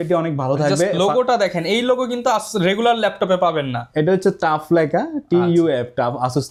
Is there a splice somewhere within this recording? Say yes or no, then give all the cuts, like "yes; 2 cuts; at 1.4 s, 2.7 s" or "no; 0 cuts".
no; 0 cuts